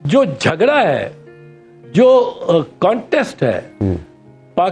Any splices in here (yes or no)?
no